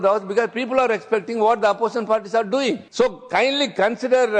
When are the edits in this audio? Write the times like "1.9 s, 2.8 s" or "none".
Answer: 2.9 s